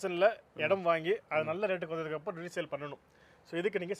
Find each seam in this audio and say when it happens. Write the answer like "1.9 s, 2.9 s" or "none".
none